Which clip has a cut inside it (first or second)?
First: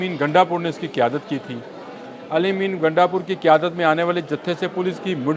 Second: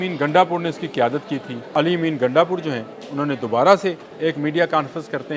second